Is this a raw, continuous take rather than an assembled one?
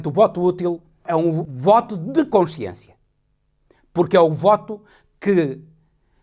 no; 1 cut; at 1.3 s

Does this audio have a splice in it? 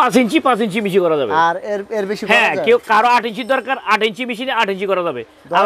no; 0 cuts

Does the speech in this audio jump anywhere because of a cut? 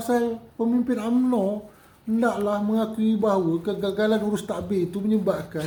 no; 0 cuts

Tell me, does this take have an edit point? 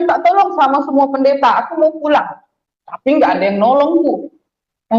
no; 0 cuts

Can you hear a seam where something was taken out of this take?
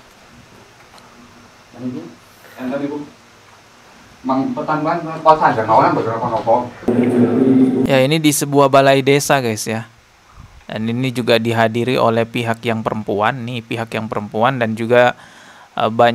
yes; 1 cut; at 6.9 s

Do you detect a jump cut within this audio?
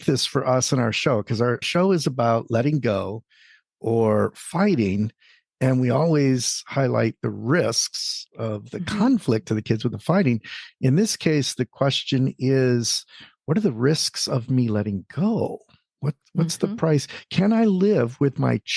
yes; 1 cut; at 1.6 s

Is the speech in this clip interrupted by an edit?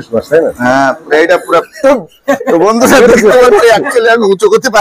yes; 1 cut; at 1.7 s

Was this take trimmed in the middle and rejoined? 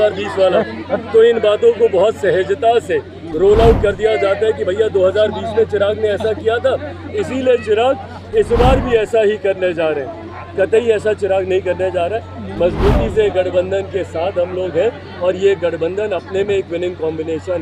no; 0 cuts

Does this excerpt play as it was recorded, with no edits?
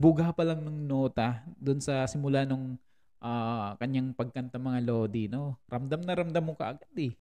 yes; 0 cuts

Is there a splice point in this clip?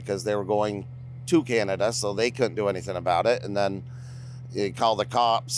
no; 0 cuts

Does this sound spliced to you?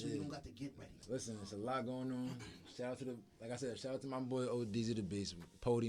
yes; 1 cut; at 0.9 s

